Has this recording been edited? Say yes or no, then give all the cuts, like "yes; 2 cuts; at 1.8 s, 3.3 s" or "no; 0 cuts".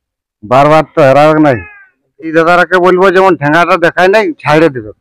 yes; 1 cut; at 2.3 s